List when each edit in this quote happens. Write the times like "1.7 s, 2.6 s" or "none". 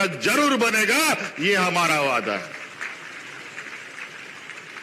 none